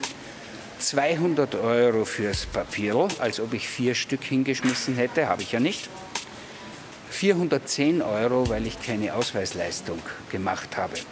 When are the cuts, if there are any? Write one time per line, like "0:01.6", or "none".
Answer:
none